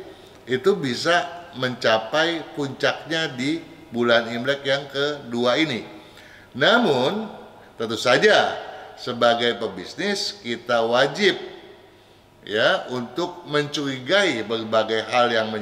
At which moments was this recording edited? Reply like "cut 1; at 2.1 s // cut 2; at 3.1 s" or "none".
none